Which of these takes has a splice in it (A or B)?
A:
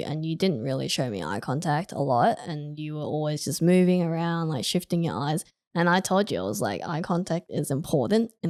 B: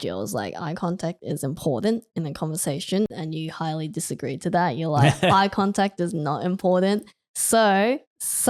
B